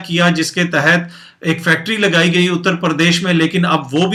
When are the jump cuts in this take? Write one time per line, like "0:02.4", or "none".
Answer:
none